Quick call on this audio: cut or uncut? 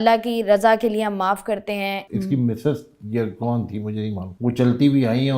cut